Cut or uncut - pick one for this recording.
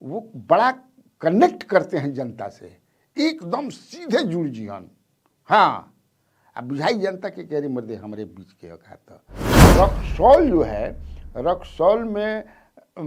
cut